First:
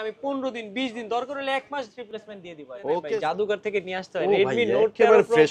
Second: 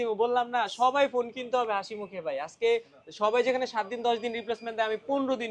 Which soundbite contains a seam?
first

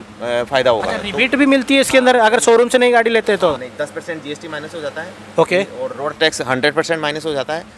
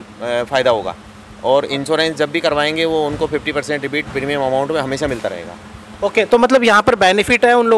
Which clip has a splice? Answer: first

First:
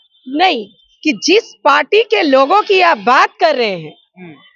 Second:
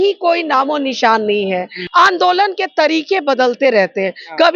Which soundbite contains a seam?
second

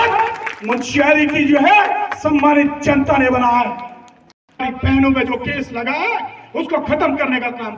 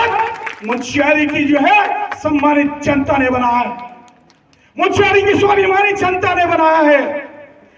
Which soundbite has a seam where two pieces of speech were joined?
first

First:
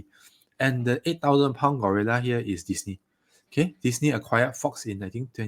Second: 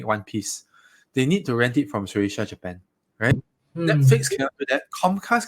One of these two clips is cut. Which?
second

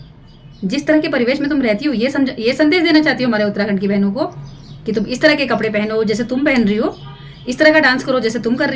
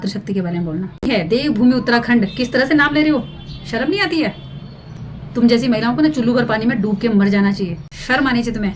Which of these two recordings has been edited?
second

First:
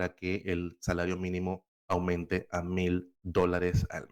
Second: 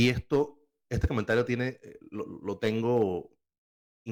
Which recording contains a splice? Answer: first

